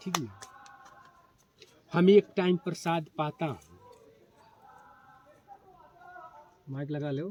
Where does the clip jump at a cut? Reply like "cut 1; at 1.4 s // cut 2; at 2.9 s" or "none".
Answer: none